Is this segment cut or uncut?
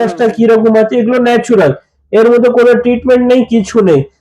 uncut